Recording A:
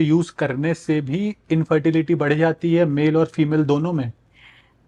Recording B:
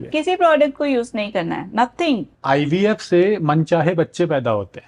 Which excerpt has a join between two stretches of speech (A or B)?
B